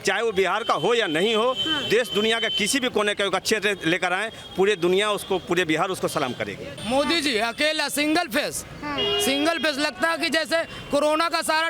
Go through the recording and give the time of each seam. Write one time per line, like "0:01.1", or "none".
0:06.8